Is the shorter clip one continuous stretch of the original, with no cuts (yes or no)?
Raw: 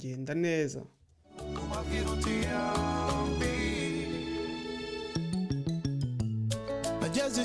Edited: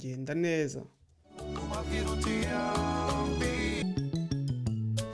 no